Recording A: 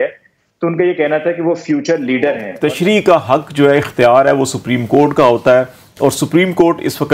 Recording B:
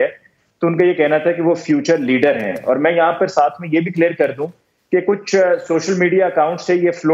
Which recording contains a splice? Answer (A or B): A